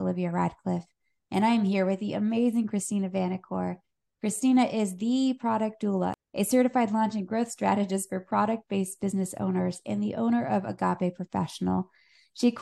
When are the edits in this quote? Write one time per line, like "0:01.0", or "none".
0:06.2